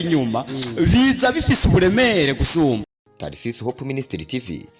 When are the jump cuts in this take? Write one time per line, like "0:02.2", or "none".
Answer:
0:02.8